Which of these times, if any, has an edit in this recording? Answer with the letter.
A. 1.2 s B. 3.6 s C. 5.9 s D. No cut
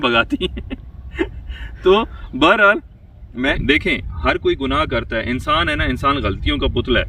B